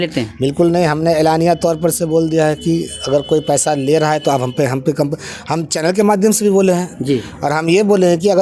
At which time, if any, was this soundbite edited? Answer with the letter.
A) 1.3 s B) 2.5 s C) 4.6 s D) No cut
D